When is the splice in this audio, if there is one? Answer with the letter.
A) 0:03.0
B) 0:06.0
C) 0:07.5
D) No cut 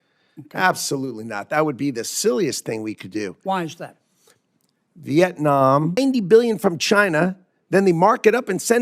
B